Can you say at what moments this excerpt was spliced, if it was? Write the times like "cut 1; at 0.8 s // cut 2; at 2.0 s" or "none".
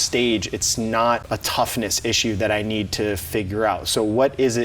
cut 1; at 1.2 s